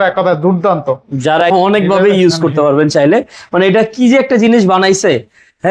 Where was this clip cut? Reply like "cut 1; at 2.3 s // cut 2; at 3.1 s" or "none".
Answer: cut 1; at 1.5 s

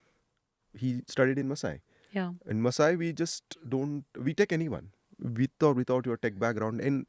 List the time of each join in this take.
none

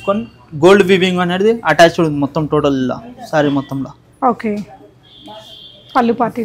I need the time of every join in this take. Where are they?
none

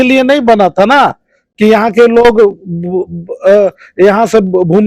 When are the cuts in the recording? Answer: none

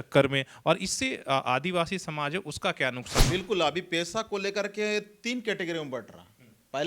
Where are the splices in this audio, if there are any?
cut 1; at 3.3 s

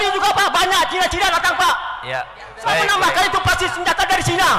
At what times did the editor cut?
none

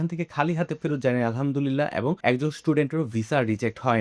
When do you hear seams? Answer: none

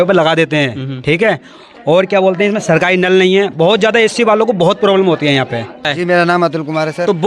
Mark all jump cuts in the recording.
cut 1; at 5.9 s

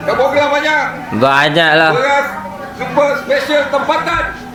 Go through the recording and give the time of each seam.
none

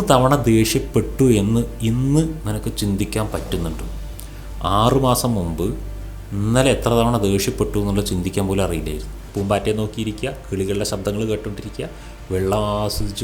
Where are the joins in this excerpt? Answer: cut 1; at 9.2 s

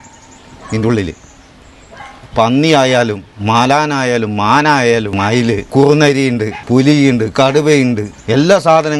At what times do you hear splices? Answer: cut 1; at 5.6 s // cut 2; at 8.1 s

